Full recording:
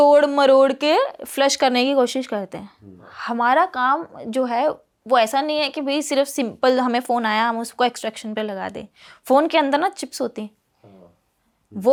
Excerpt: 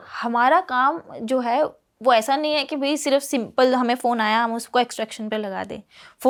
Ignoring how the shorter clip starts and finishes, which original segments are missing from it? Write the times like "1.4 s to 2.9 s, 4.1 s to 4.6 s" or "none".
none